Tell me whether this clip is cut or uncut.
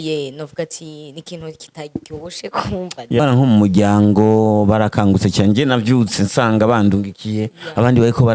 cut